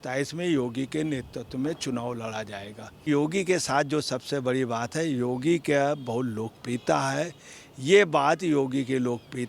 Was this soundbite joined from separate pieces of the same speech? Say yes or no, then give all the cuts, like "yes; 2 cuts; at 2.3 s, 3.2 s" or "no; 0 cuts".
yes; 1 cut; at 3.0 s